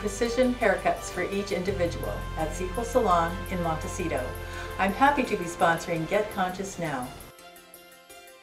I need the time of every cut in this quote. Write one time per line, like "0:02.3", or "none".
0:07.2